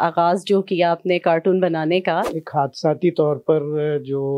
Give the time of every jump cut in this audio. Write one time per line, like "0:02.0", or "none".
0:02.4